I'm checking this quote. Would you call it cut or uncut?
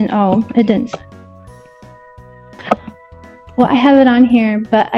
uncut